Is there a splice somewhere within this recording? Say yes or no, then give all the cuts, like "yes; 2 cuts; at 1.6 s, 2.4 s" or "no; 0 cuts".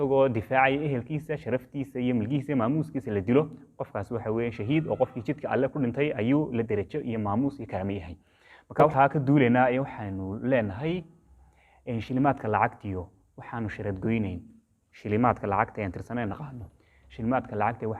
yes; 1 cut; at 8.9 s